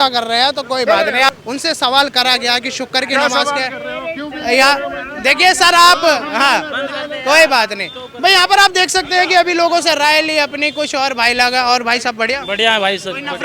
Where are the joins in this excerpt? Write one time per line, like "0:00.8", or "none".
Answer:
0:01.3

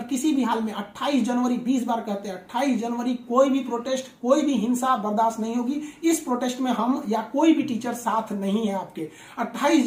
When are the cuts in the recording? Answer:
none

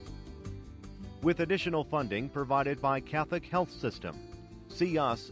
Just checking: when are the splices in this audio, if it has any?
0:01.1

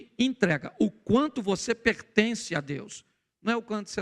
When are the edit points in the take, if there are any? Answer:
none

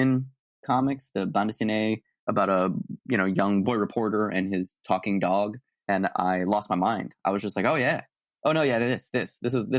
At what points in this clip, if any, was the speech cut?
0:03.6
0:05.7

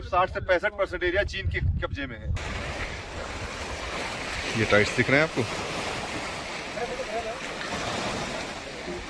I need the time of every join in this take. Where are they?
0:02.4

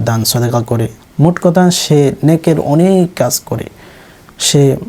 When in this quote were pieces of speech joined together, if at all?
none

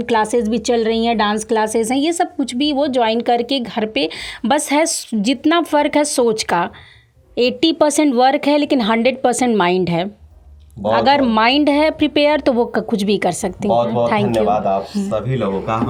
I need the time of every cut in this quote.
none

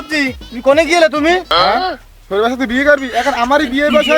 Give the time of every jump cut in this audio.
0:01.5

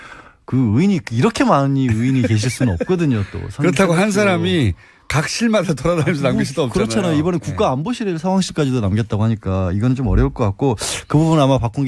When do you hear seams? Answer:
0:06.6

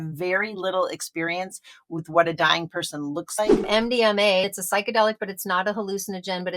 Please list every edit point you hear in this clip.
0:03.7
0:04.5

